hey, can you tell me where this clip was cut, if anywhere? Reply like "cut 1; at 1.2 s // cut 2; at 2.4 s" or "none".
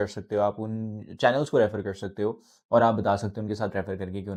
none

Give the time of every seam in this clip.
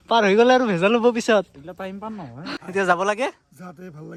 none

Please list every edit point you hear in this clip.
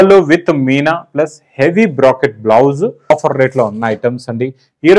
cut 1; at 3.1 s

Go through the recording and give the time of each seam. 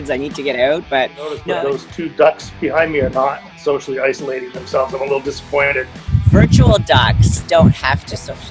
cut 1; at 1.4 s // cut 2; at 6.1 s

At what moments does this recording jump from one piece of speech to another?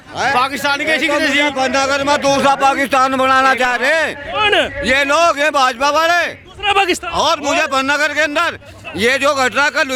none

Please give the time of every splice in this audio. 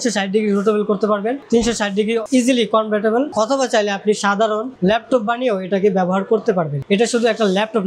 cut 1; at 3.3 s // cut 2; at 6.8 s

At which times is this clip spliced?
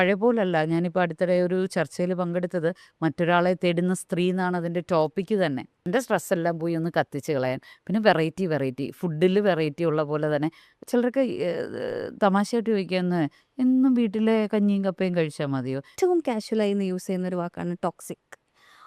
cut 1; at 5.7 s // cut 2; at 15.9 s

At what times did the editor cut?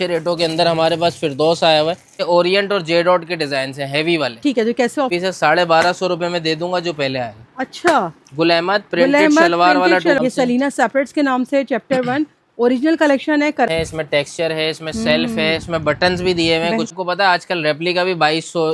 cut 1; at 2.2 s // cut 2; at 5.1 s // cut 3; at 10.2 s // cut 4; at 13.7 s // cut 5; at 16.9 s

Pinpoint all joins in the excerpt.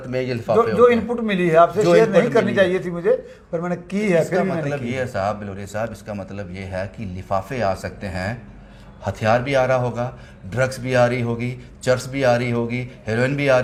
none

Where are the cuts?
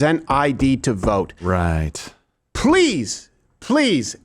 none

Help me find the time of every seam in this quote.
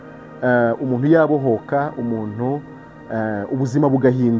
none

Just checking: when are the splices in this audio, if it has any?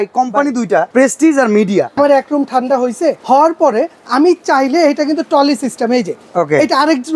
cut 1; at 0.9 s // cut 2; at 2.0 s // cut 3; at 3.2 s

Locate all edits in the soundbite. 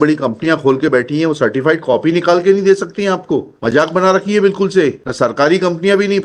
cut 1; at 3.5 s // cut 2; at 5.0 s

